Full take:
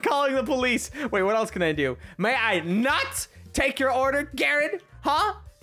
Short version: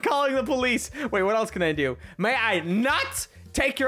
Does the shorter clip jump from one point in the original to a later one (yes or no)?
no